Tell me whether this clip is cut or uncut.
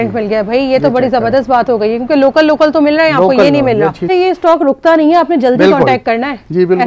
cut